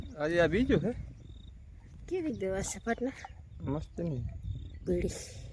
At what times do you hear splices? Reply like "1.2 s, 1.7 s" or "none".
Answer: none